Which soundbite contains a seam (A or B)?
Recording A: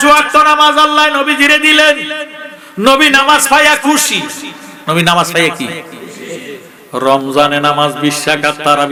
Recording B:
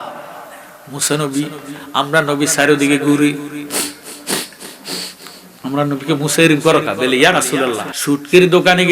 B